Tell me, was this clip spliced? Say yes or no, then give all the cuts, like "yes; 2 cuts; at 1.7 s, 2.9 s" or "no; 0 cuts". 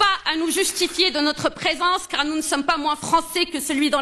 no; 0 cuts